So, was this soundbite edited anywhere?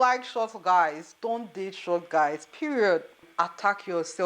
yes; 1 cut; at 3.2 s

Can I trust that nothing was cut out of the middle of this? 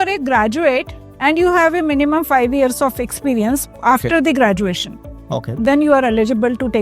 yes; 0 cuts

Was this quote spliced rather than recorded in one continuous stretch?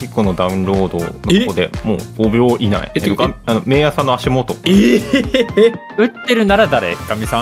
yes; 5 cuts; at 1.1 s, 2.1 s, 2.9 s, 4.5 s, 5.9 s

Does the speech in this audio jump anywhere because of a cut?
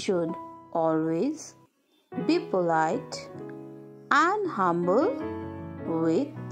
no; 0 cuts

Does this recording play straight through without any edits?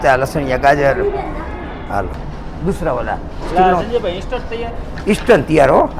no; 1 cut; at 2.3 s

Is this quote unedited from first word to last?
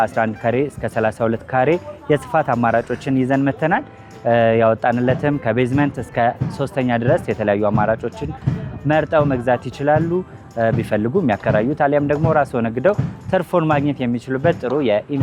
yes; 0 cuts

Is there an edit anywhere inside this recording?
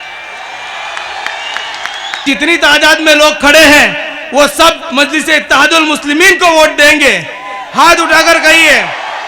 yes; 1 cut; at 2.2 s

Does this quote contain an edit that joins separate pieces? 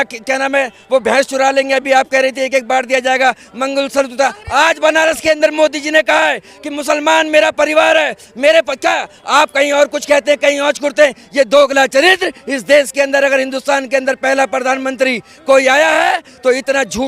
no; 0 cuts

